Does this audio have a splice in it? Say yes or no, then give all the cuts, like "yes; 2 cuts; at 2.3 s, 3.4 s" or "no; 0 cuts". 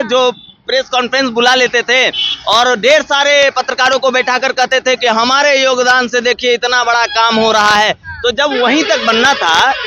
no; 0 cuts